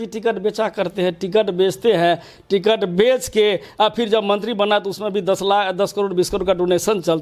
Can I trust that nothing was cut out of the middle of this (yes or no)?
yes